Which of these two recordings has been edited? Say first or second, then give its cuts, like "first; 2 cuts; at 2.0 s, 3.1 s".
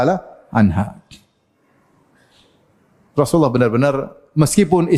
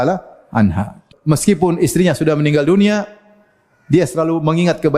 second; 1 cut; at 1.1 s